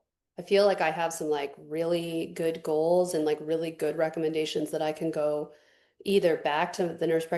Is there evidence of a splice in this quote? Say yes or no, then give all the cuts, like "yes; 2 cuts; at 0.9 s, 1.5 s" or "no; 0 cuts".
no; 0 cuts